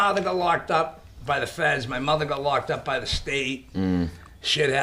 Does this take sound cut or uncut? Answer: uncut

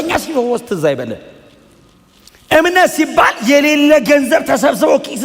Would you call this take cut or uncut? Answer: uncut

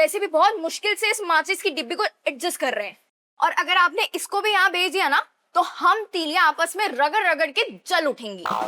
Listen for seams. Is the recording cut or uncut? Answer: uncut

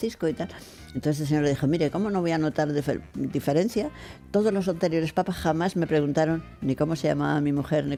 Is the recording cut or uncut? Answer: uncut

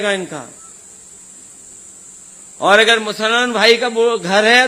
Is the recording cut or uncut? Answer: uncut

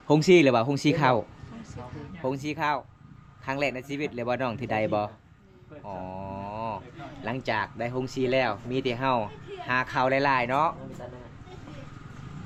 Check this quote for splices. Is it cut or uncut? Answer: uncut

